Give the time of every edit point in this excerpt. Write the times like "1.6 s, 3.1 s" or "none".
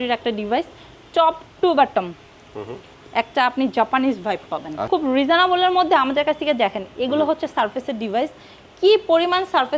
4.9 s